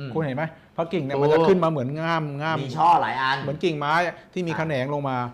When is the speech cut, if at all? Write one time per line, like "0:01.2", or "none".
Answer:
none